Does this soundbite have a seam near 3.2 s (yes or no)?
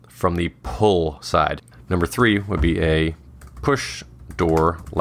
no